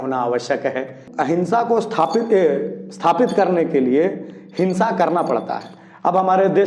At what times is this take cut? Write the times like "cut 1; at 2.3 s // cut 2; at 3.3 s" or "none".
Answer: cut 1; at 1.0 s